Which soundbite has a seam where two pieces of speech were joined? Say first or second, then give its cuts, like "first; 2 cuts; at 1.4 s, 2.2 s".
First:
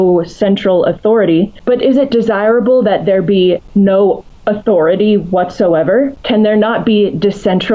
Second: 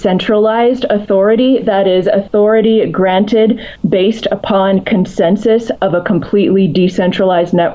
first; 4 cuts; at 1.6 s, 3.6 s, 4.3 s, 6.2 s